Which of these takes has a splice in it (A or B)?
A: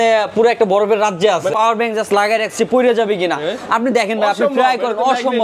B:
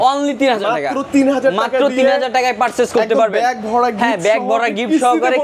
A